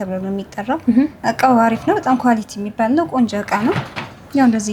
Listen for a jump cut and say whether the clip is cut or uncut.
uncut